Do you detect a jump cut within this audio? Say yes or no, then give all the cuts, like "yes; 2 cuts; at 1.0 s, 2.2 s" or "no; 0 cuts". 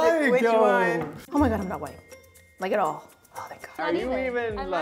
yes; 2 cuts; at 1.1 s, 3.6 s